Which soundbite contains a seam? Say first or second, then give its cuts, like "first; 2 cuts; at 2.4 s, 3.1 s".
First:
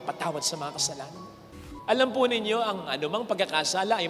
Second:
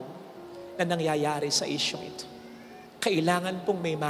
first; 1 cut; at 1.6 s